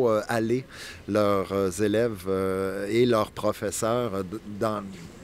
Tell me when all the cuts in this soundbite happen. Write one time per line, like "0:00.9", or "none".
none